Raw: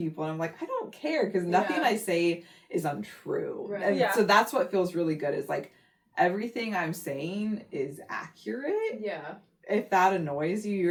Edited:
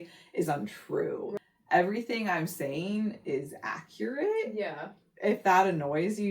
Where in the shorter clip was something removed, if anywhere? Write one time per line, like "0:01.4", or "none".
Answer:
0:01.3